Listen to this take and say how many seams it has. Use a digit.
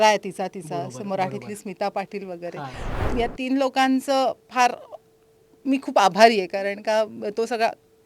1